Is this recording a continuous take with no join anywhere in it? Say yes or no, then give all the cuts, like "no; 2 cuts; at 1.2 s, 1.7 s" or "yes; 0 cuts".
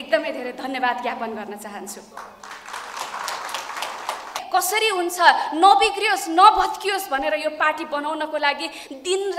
no; 1 cut; at 4.4 s